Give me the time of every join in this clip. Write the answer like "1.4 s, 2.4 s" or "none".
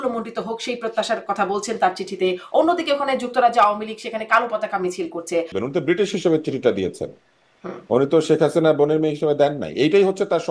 5.6 s